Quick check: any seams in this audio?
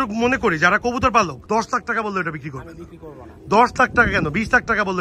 yes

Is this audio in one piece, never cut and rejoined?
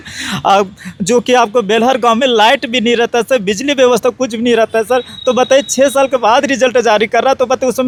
yes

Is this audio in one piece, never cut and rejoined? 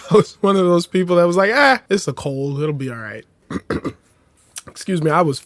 no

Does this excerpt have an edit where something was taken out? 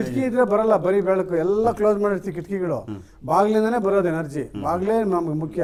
no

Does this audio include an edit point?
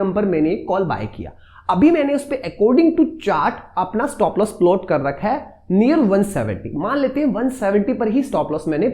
no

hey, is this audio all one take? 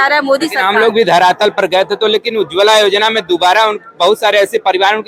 yes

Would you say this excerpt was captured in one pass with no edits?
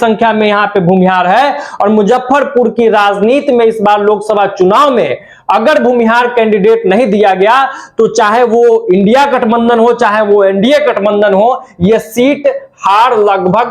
yes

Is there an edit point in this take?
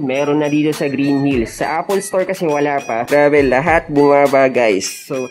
yes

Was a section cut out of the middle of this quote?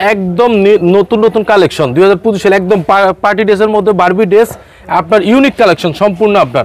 no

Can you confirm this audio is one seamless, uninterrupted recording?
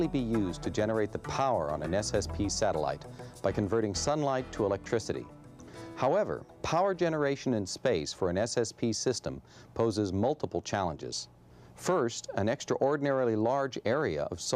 no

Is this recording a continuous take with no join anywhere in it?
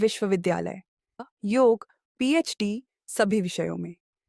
no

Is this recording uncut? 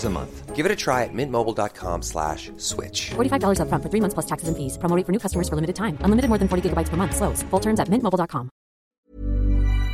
no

